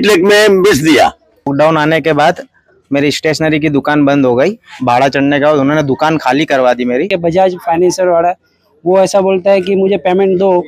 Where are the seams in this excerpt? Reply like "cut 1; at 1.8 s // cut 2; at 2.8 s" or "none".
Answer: cut 1; at 1.5 s // cut 2; at 7.1 s